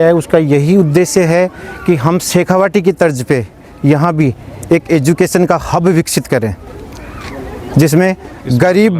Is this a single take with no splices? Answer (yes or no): yes